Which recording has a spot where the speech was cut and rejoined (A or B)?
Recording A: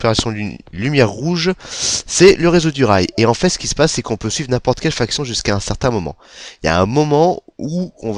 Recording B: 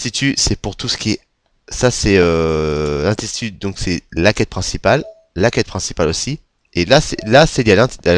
B